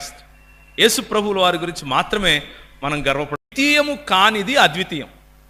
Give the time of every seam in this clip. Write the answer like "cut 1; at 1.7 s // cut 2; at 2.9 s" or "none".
cut 1; at 3.3 s